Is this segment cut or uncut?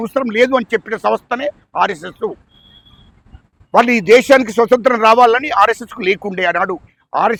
uncut